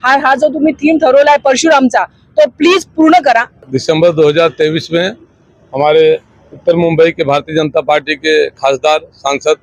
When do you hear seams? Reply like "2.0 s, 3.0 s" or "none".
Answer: 3.6 s